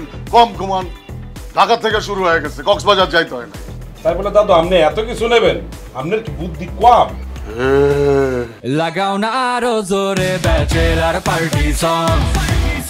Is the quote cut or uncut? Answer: cut